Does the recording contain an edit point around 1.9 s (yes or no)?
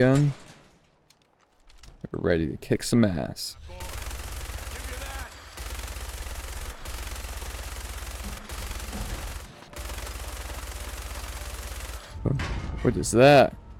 no